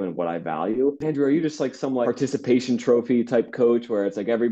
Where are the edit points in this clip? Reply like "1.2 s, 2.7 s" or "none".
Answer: 1.0 s, 2.1 s

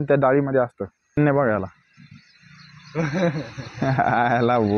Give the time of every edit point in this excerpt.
1.2 s

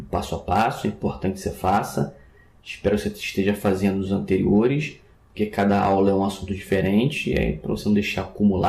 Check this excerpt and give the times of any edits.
7.6 s

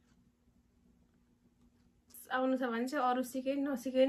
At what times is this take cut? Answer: 2.1 s

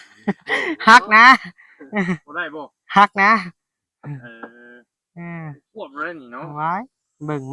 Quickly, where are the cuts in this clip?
none

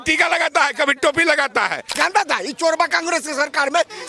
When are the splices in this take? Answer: 1.9 s

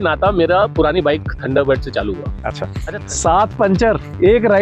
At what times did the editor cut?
2.7 s

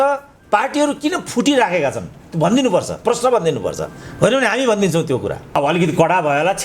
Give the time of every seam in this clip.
5.6 s

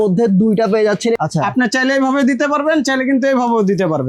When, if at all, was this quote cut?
1.2 s

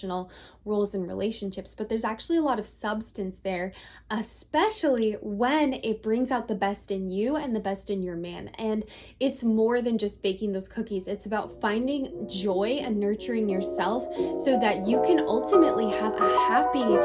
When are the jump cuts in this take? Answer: none

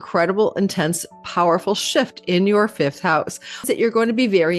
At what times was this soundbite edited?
3.6 s

